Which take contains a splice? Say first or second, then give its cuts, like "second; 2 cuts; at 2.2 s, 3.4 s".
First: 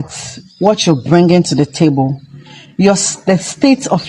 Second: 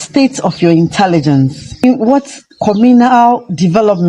second; 1 cut; at 1.8 s